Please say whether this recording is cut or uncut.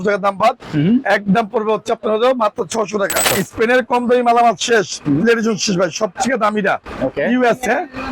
cut